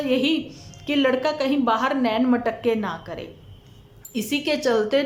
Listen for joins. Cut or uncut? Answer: uncut